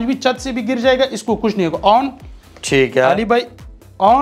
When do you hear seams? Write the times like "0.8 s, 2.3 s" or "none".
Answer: none